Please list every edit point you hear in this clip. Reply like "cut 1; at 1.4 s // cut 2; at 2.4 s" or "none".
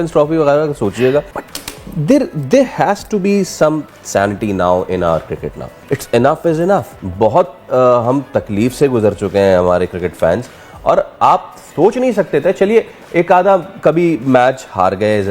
none